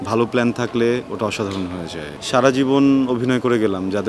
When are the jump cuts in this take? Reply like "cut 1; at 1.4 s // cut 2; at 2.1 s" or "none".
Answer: cut 1; at 2.1 s